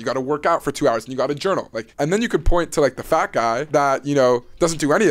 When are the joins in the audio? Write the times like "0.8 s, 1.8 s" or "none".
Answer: 1.8 s, 3.6 s